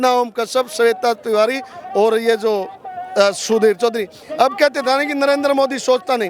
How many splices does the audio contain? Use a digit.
1